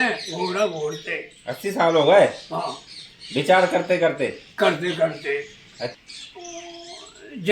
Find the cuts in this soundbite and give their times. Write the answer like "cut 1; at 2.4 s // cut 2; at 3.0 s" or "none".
cut 1; at 5.9 s